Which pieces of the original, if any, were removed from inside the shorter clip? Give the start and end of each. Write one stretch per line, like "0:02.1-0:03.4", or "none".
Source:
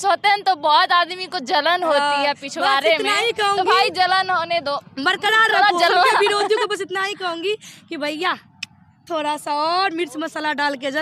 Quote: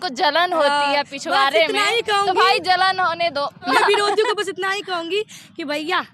0:05.0-0:06.0